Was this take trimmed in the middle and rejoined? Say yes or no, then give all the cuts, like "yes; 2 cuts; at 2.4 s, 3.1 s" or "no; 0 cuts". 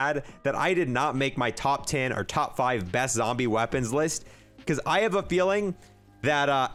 no; 0 cuts